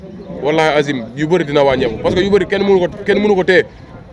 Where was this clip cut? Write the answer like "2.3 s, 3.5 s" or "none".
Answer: none